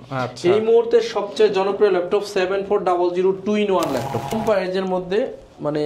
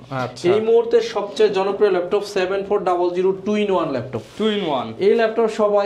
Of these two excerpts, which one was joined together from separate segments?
first; 1 cut; at 4.4 s

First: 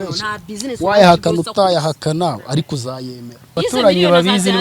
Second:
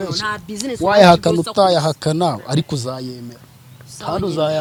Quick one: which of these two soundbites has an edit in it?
first; 1 cut; at 3.6 s

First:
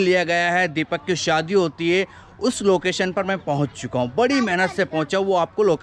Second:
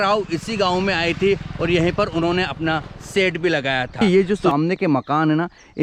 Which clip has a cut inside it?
second; 1 cut; at 4.0 s

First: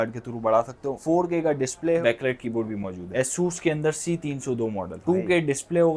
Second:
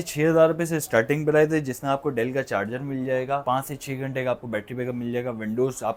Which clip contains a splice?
first; 1 cut; at 3.0 s

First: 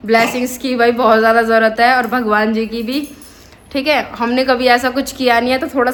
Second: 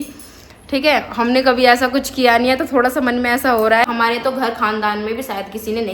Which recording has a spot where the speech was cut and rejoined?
second; 1 cut; at 3.9 s

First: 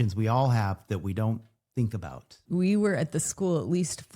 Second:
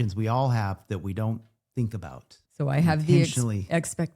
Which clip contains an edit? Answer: first; 1 cut; at 2.3 s

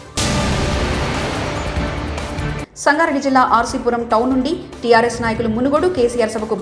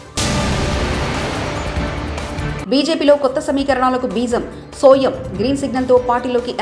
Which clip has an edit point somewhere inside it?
first; 1 cut; at 2.5 s

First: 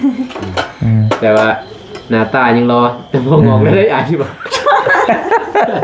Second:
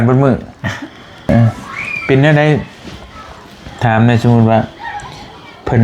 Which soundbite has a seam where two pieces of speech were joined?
second; 1 cut; at 1.3 s

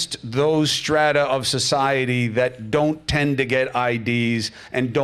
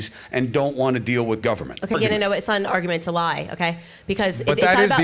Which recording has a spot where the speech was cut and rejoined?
second; 1 cut; at 1.9 s

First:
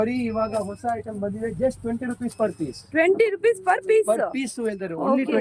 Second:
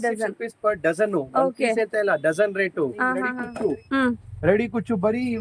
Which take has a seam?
second; 1 cut; at 3.4 s

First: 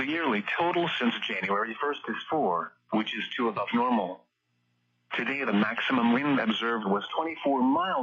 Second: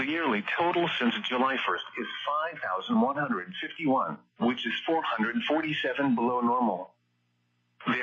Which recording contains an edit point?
second; 1 cut; at 1.1 s

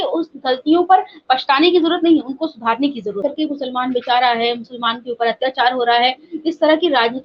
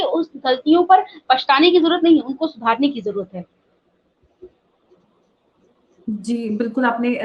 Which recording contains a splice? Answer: first; 1 cut; at 3.2 s

